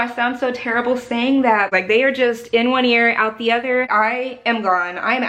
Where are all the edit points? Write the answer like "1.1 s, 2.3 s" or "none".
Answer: 1.7 s, 3.9 s